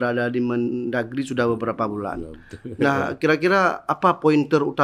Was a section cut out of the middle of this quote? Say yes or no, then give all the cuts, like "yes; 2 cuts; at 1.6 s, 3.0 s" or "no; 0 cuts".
no; 0 cuts